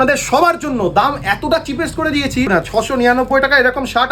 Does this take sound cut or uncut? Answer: cut